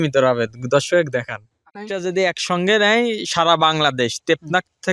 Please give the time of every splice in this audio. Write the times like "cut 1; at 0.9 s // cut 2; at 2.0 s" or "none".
cut 1; at 1.8 s